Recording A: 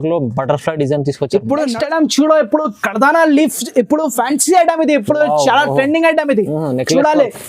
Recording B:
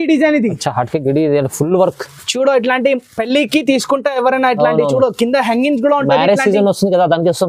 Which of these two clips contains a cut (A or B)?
A